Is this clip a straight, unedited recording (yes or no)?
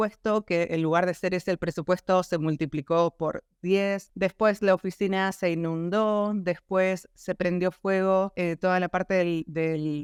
yes